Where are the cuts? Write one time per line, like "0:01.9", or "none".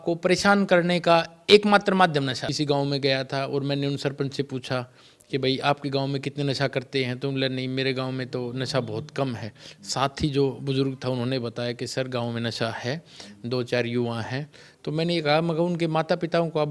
0:02.5

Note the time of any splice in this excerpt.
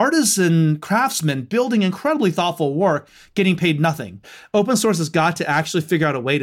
0:04.3

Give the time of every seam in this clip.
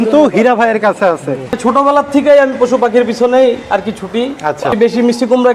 0:01.5
0:04.7

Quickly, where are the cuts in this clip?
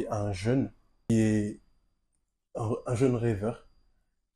0:01.1

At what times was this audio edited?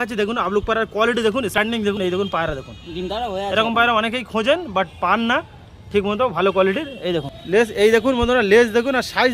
0:01.6
0:07.4

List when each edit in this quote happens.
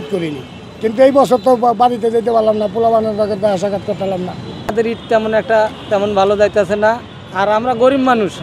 0:04.6

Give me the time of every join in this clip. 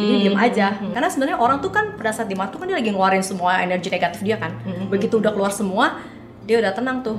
0:00.9

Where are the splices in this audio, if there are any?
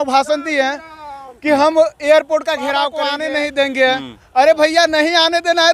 0:03.0

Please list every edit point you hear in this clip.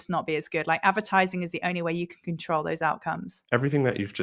0:03.3

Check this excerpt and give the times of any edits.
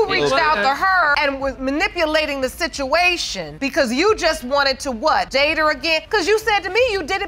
0:03.6
0:05.5

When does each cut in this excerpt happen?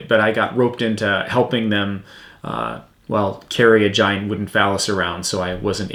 none

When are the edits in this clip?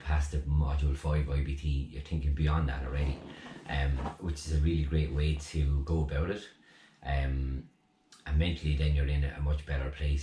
0:04.4

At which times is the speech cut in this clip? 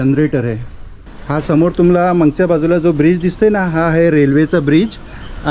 0:01.1

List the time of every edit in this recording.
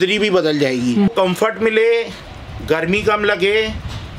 0:01.1

